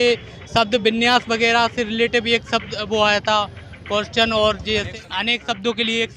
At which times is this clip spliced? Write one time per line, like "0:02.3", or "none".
0:04.9